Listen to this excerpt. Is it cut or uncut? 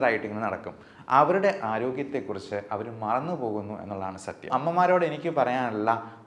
cut